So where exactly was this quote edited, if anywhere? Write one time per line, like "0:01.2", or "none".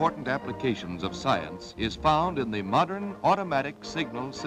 0:02.9